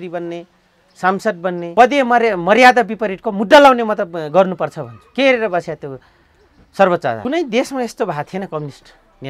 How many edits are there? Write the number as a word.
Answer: two